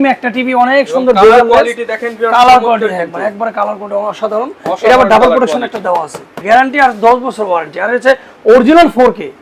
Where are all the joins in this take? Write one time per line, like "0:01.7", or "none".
0:06.4